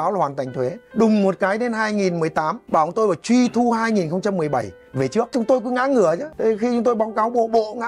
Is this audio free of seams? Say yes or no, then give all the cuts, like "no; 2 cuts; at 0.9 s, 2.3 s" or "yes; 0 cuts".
no; 4 cuts; at 0.8 s, 2.6 s, 5.3 s, 6.3 s